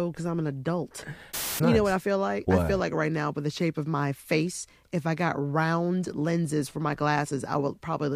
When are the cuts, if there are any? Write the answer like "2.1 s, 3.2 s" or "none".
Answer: 1.4 s